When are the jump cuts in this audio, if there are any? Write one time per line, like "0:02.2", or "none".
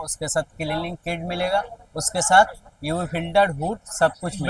none